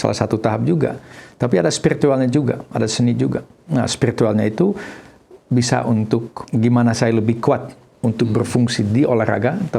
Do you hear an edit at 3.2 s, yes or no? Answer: no